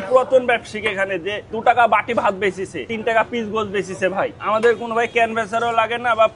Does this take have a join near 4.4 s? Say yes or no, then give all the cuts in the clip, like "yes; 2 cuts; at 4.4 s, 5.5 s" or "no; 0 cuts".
yes; 2 cuts; at 2.9 s, 4.4 s